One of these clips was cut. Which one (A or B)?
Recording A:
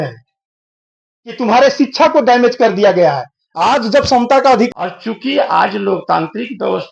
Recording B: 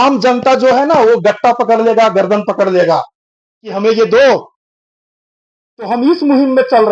A